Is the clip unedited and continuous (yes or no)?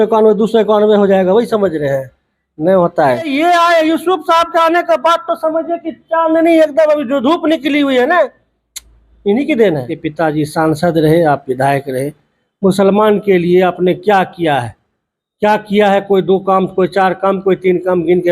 no